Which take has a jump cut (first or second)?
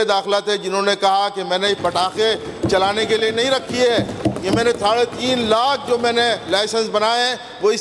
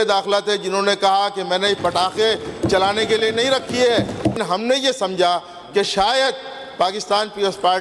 second